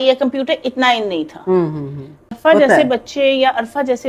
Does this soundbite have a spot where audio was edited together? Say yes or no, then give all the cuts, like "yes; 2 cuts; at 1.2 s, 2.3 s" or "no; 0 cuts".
yes; 1 cut; at 2.3 s